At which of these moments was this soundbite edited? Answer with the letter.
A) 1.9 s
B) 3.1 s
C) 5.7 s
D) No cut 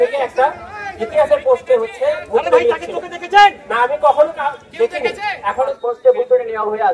C